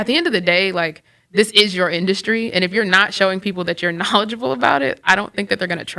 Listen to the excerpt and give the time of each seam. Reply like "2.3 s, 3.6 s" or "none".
none